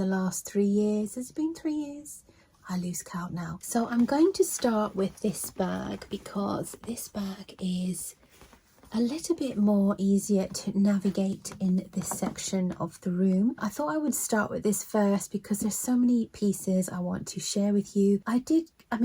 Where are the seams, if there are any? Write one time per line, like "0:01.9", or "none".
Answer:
0:03.6